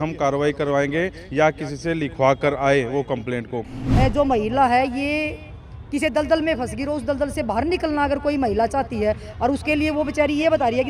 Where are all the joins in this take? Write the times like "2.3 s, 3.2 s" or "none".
3.8 s